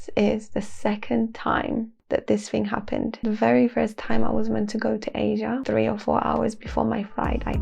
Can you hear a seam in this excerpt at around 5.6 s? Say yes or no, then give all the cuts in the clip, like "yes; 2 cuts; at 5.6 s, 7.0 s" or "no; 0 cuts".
yes; 3 cuts; at 2.0 s, 3.2 s, 5.6 s